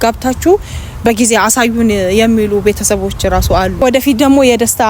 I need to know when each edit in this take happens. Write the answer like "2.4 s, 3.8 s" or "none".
3.8 s